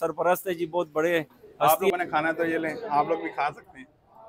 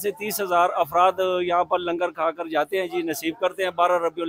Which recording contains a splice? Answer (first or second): first